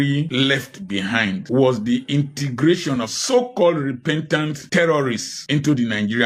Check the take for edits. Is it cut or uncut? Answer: uncut